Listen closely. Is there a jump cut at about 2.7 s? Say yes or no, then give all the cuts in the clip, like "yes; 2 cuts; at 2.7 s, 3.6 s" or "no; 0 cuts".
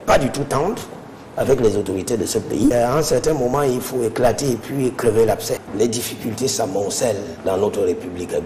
yes; 2 cuts; at 2.7 s, 5.7 s